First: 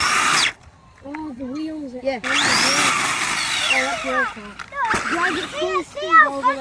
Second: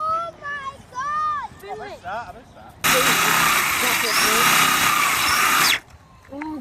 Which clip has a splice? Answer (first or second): second